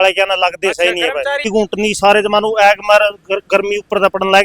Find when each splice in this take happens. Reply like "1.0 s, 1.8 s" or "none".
1.4 s